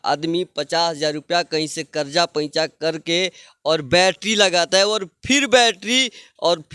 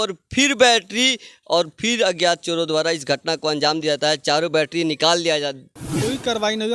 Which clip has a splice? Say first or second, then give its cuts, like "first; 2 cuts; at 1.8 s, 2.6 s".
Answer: second; 1 cut; at 5.8 s